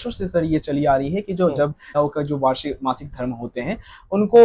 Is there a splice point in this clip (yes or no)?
yes